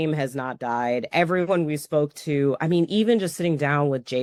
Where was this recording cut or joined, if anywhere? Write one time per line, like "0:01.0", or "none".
none